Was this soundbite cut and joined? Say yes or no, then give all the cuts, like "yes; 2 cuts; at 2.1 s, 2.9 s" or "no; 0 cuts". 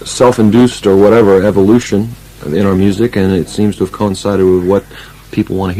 no; 0 cuts